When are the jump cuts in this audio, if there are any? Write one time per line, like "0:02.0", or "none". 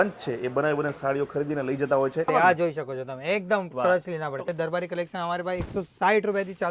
0:02.3
0:04.5